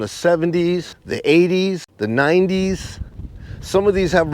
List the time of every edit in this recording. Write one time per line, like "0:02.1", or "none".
0:01.0
0:01.9